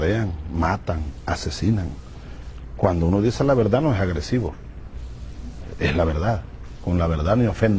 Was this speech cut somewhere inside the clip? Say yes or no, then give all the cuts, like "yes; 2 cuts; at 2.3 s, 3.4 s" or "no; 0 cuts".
yes; 1 cut; at 6.1 s